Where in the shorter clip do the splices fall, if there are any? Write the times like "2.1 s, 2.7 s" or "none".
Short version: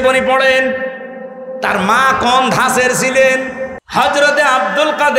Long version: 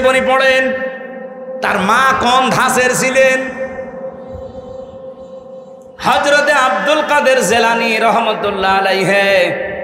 3.7 s